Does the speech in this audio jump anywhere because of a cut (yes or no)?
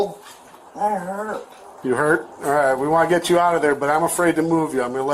no